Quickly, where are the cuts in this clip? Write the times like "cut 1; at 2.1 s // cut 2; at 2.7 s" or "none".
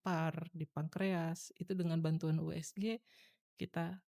none